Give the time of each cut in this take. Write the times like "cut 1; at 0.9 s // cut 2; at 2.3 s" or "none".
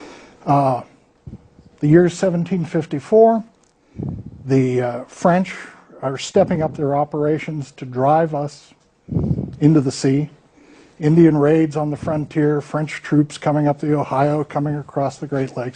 cut 1; at 8.1 s